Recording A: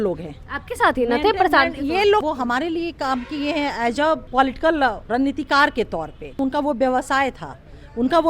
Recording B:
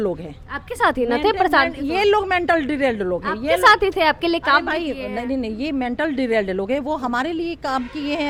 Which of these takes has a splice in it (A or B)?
A